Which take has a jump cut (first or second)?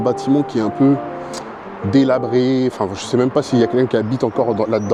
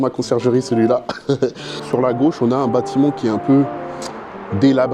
second